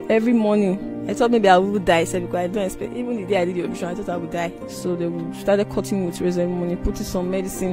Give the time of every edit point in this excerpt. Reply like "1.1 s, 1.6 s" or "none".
1.0 s, 4.7 s